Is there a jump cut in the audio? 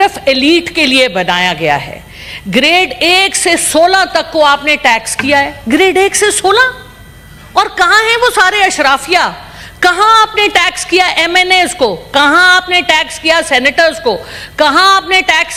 no; 0 cuts

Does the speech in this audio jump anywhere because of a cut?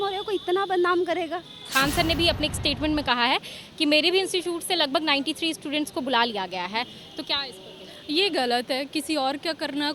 yes; 1 cut; at 1.7 s

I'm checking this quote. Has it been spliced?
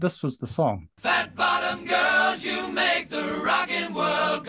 yes; 1 cut; at 0.9 s

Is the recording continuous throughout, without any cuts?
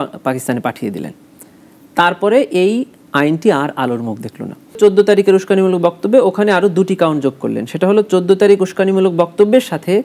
no; 1 cut; at 4.8 s

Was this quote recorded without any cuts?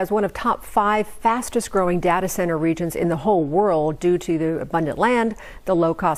yes; 0 cuts

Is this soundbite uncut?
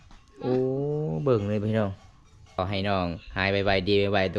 no; 1 cut; at 2.6 s

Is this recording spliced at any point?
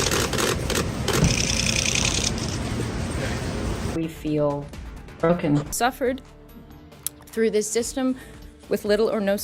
yes; 2 cuts; at 3.8 s, 5.7 s

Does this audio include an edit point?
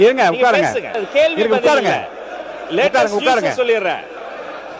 yes; 1 cut; at 1.0 s

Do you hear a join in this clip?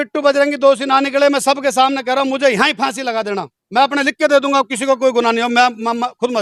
no; 0 cuts

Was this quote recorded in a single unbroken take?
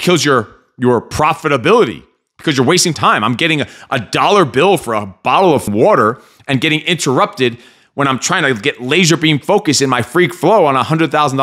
no; 2 cuts; at 3.0 s, 5.7 s

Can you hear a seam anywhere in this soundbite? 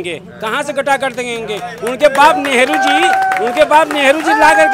no; 0 cuts

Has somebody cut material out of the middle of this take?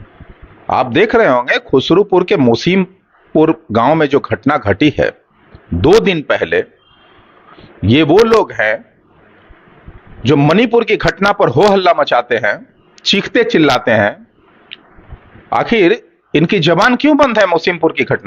no; 0 cuts

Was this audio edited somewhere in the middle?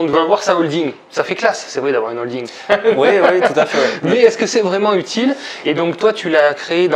no; 0 cuts

